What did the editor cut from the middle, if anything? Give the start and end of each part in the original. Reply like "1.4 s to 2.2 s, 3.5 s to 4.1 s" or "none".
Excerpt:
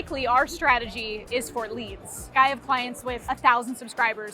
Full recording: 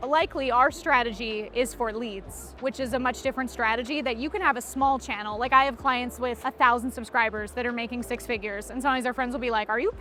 2.6 s to 5.5 s